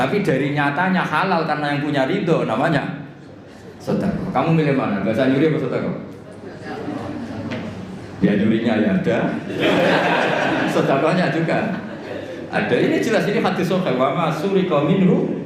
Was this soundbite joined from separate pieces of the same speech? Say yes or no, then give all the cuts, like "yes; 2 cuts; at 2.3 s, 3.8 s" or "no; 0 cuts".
no; 0 cuts